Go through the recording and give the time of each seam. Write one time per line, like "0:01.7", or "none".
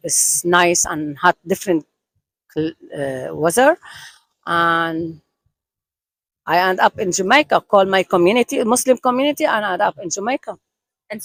none